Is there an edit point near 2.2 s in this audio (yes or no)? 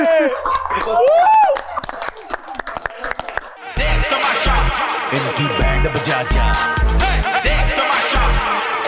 no